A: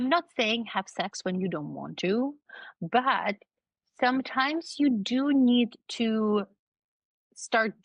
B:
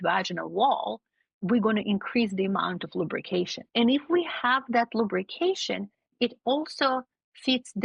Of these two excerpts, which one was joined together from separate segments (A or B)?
B